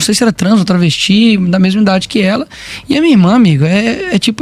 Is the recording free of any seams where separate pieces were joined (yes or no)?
yes